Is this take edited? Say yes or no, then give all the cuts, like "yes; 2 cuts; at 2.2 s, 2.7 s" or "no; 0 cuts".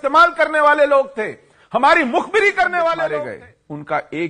yes; 1 cut; at 3.1 s